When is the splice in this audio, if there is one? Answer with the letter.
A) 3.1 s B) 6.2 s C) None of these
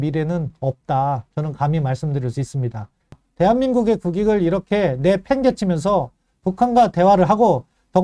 A